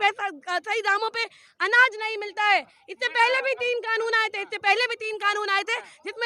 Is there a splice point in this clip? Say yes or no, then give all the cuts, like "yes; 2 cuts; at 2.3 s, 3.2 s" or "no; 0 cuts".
no; 0 cuts